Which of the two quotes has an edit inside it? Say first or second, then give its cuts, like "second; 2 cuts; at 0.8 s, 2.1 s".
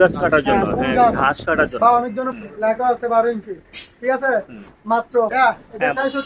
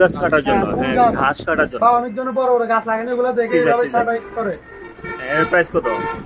first; 2 cuts; at 2.3 s, 5.3 s